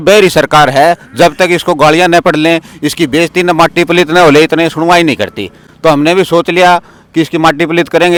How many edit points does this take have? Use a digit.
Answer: 0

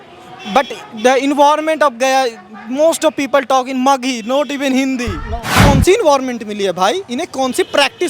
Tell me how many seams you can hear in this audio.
1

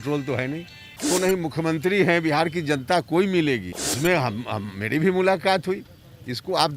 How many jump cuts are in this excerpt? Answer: 2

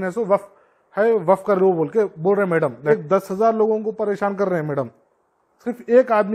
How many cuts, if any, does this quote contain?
1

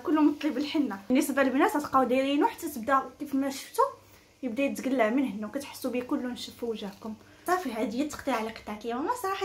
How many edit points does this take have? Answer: 1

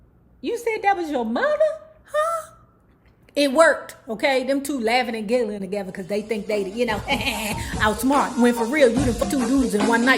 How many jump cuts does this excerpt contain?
1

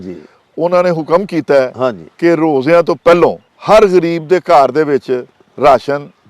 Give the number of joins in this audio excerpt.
1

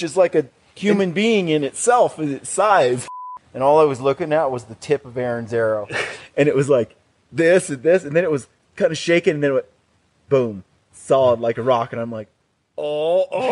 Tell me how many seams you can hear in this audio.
1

